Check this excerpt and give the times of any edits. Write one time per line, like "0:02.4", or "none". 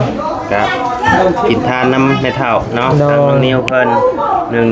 none